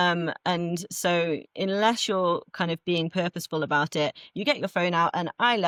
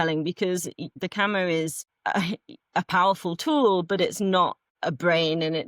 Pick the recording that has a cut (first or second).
second